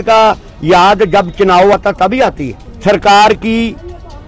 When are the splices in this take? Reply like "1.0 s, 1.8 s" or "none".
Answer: 2.1 s